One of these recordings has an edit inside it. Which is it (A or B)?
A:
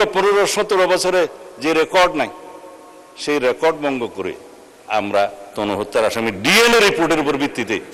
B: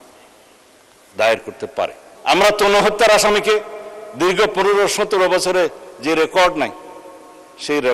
B